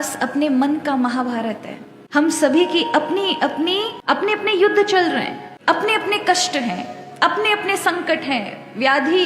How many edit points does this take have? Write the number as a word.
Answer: zero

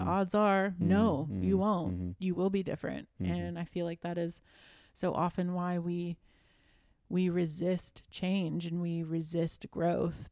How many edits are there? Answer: zero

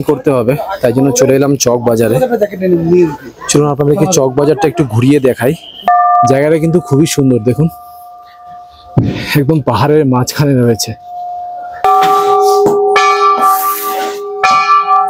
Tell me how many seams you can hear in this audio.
two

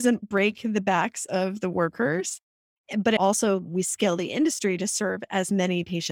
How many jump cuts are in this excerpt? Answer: one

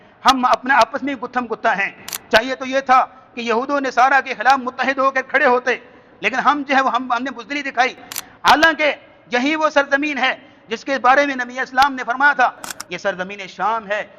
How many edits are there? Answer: one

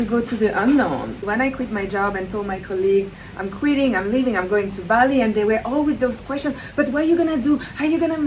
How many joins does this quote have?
one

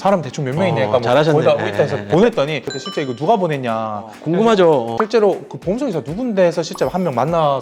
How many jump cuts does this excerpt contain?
one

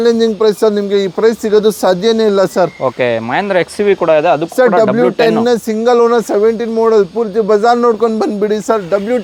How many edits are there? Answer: zero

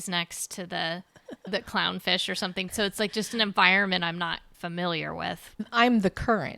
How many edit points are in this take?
three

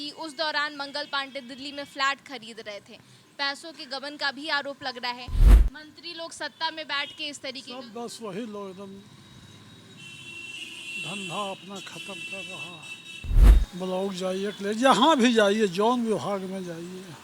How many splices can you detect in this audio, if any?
two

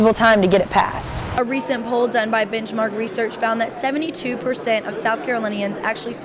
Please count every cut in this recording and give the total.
one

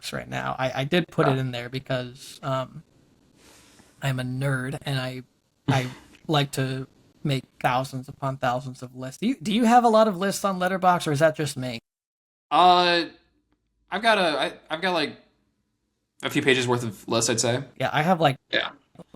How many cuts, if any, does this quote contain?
one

